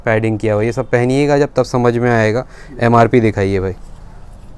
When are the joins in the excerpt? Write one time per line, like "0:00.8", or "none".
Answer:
none